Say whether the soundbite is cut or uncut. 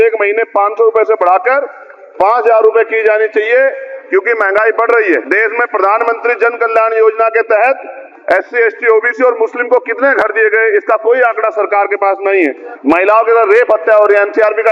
cut